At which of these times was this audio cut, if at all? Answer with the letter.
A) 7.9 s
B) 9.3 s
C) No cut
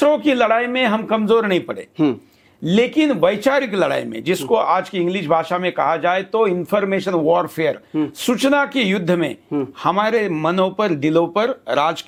C